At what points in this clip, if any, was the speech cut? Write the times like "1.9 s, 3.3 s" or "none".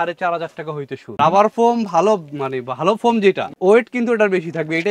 1.1 s, 3.5 s